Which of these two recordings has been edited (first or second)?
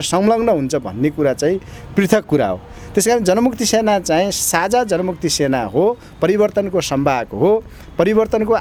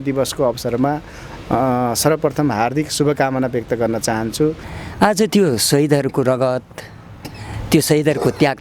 second